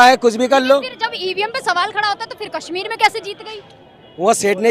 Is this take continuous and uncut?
yes; 0 cuts

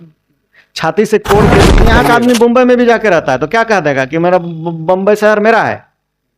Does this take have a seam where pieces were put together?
yes; 1 cut; at 1.8 s

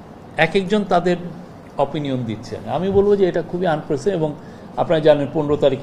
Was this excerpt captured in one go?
yes; 0 cuts

